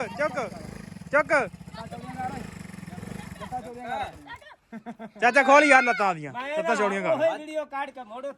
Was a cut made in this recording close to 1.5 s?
no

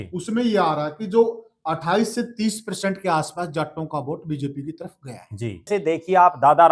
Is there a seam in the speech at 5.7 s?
yes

